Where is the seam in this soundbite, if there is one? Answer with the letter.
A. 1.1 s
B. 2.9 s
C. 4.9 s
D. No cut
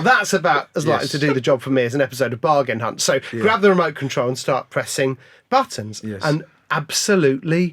D